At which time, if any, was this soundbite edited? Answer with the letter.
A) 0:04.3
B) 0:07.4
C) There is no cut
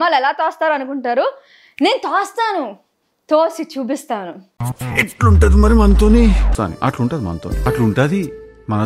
C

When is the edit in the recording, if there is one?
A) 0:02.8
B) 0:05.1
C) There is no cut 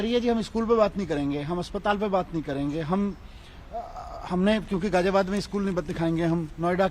C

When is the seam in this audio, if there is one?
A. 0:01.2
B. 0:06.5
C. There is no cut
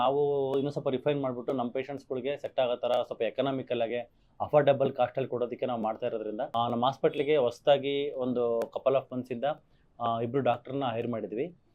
B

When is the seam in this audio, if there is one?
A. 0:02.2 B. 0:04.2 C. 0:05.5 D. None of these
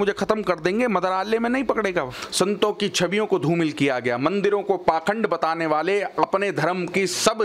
A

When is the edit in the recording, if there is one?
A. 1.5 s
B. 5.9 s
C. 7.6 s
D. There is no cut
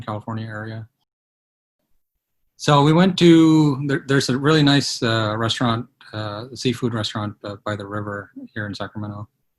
A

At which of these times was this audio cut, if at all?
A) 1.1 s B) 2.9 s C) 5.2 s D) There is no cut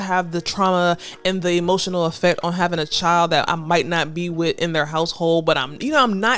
D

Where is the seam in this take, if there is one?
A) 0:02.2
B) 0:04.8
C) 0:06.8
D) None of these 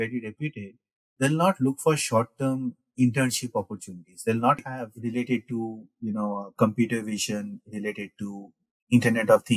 B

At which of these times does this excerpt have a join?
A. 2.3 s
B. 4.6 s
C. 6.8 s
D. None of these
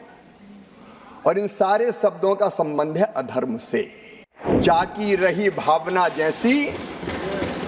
B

